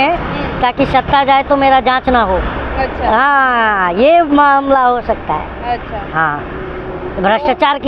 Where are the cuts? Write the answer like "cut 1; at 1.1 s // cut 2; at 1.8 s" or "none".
none